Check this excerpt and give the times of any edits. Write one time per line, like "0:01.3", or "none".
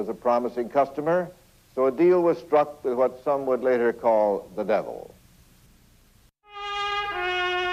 none